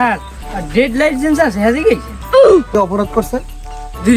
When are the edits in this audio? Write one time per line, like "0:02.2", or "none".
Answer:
0:02.8